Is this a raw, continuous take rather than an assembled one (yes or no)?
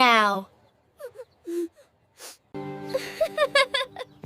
yes